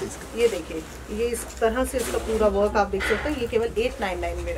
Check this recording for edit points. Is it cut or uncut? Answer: uncut